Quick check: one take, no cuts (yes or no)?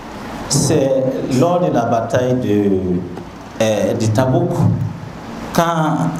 yes